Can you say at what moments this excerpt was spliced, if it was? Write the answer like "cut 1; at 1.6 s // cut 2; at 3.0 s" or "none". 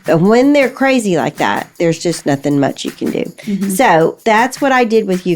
cut 1; at 4.2 s